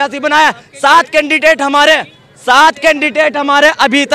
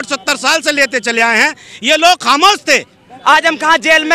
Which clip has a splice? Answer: second; 1 cut; at 3.1 s

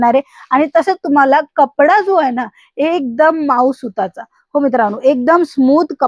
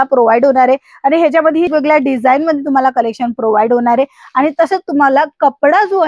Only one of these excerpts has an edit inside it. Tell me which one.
second; 1 cut; at 1.7 s

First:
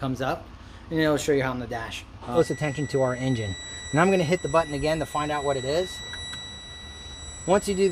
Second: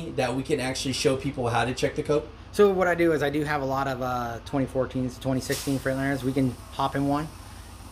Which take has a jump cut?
first; 1 cut; at 2.3 s

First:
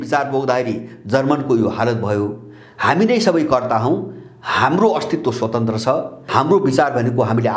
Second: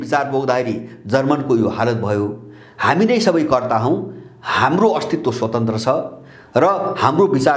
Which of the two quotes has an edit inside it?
first; 1 cut; at 6.2 s

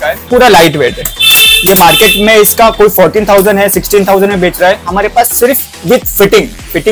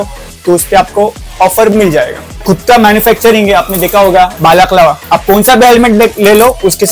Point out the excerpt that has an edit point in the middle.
second; 3 cuts; at 2.4 s, 4.3 s, 5.0 s

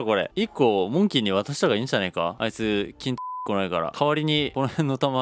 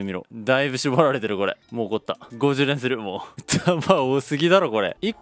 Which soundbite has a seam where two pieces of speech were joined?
second; 1 cut; at 3.4 s

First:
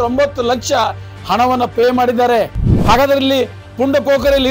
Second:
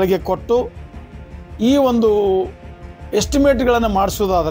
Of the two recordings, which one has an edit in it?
first; 1 cut; at 2.6 s

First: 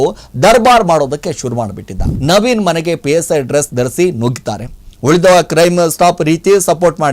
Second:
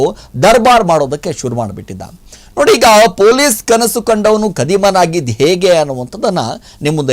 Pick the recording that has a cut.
first; 1 cut; at 2.1 s

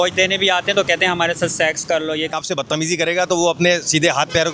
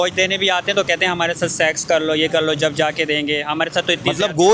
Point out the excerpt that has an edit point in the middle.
first; 1 cut; at 2.3 s

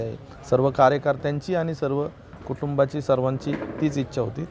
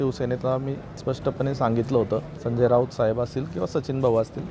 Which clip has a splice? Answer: second; 2 cuts; at 0.9 s, 2.4 s

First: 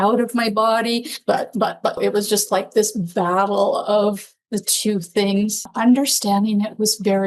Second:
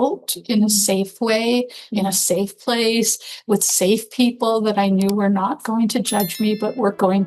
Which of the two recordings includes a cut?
first; 2 cuts; at 2.0 s, 5.7 s

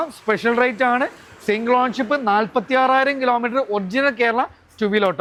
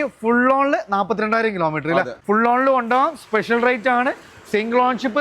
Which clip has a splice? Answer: second; 1 cut; at 2.1 s

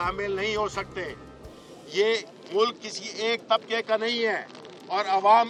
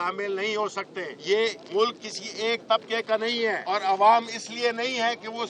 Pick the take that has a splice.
second; 2 cuts; at 1.6 s, 3.6 s

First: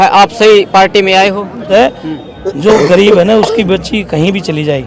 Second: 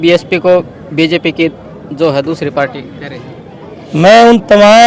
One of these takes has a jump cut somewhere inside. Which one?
first; 1 cut; at 1.7 s

